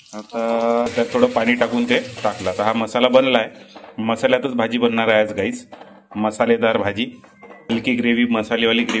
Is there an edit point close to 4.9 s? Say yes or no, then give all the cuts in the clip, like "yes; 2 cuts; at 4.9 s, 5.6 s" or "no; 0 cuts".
no; 2 cuts; at 0.9 s, 7.7 s